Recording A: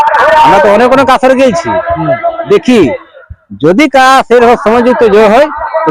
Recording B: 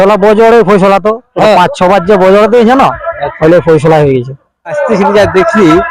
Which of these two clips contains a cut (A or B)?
B